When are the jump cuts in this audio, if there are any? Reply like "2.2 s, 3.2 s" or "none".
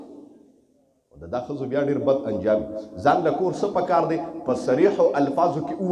none

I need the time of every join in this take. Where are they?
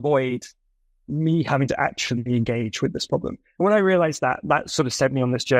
none

